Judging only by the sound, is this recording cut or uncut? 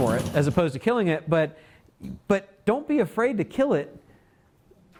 uncut